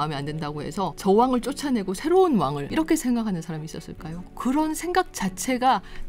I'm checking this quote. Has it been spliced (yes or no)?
yes